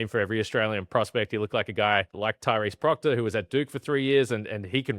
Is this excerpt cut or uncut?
cut